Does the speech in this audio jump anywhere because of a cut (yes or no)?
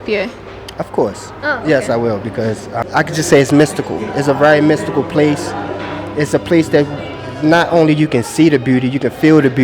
yes